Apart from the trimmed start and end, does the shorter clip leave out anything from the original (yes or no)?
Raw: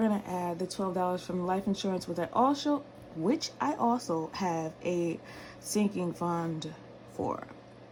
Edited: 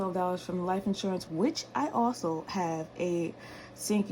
yes